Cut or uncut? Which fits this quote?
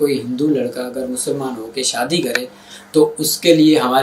uncut